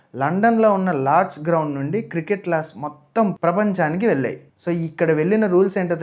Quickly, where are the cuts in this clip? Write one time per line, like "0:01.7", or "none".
none